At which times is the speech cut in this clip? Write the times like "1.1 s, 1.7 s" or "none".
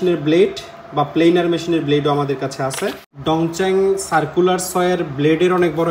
3.1 s